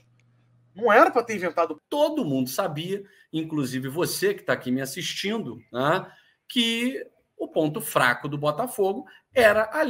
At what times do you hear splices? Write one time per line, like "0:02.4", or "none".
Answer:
0:01.8